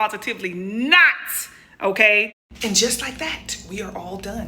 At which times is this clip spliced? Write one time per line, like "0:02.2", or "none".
0:02.6